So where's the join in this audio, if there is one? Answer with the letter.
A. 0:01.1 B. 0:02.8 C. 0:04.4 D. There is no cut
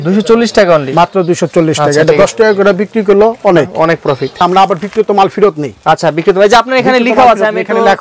C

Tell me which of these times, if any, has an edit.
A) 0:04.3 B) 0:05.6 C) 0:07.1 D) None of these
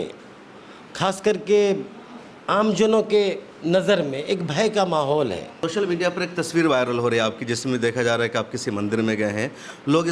B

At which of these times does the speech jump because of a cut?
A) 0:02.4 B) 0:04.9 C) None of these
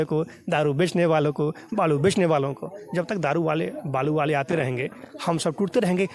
C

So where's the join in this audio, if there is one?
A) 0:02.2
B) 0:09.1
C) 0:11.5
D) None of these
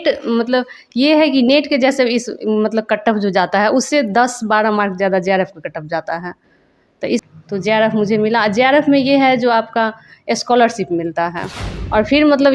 C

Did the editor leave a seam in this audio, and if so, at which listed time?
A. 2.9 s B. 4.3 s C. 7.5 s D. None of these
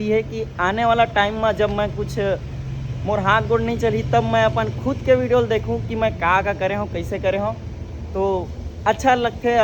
D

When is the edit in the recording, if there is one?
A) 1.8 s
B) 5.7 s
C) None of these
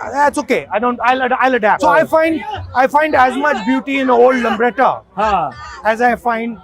A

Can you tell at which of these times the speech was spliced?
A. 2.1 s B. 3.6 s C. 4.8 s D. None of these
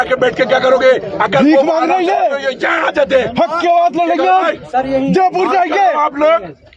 D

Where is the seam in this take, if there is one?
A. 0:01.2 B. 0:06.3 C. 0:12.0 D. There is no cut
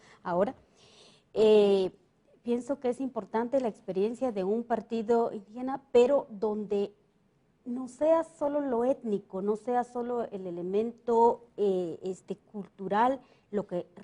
C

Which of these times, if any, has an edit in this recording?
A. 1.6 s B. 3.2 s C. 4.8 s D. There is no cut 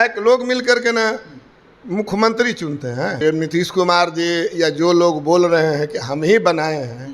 B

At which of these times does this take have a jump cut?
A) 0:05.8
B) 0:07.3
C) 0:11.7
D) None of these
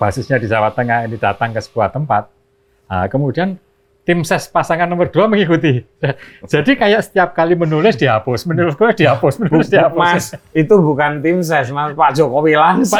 D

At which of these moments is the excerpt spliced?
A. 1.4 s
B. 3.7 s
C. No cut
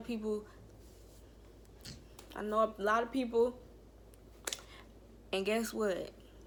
C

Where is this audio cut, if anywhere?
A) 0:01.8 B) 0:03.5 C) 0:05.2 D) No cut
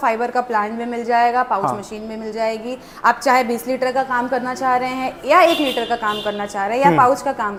D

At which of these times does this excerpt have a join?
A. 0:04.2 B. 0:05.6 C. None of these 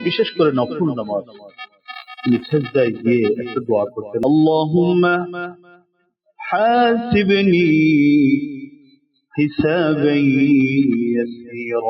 A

